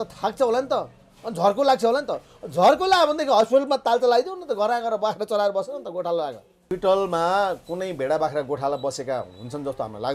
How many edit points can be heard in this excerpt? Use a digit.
1